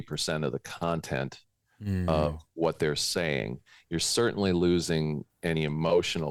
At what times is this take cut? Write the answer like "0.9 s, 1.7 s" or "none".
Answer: none